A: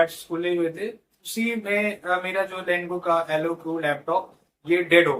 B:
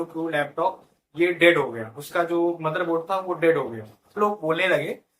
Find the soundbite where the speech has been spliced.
B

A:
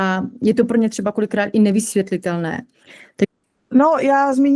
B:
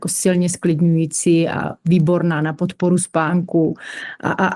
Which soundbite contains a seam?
A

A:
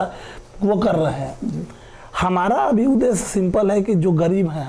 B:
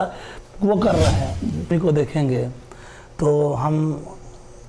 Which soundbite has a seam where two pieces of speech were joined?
B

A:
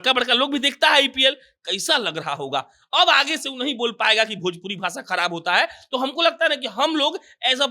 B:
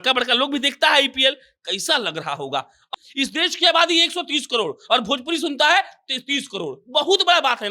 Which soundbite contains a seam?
B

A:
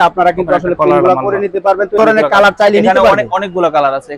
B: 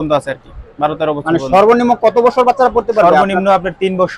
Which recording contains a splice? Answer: A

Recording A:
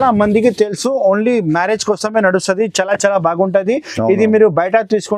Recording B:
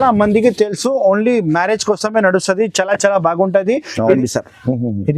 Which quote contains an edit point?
B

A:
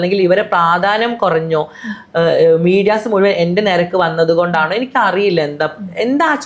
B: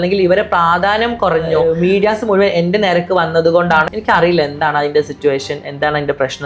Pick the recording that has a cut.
B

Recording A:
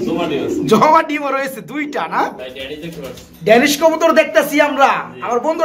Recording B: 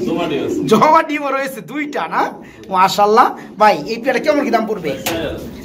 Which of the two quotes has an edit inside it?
A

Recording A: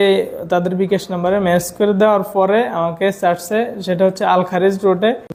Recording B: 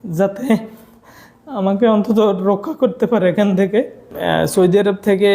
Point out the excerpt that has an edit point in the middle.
B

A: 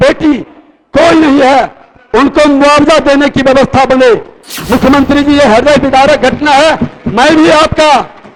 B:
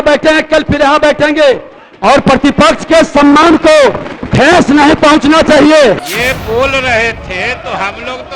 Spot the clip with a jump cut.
B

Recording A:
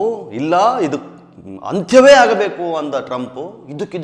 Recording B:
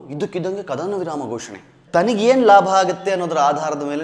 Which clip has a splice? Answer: B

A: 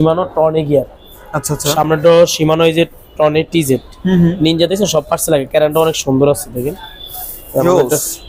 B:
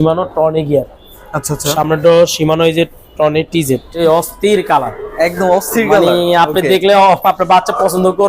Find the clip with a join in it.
B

